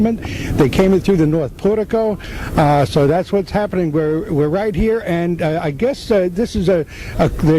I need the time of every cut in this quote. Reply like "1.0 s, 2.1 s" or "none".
3.5 s